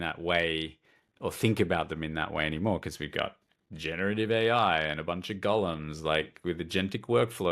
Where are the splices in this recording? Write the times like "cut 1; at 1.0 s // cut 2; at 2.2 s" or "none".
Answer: none